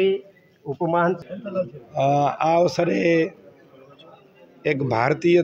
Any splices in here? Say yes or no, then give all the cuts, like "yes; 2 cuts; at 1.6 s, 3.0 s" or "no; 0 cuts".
yes; 1 cut; at 1.3 s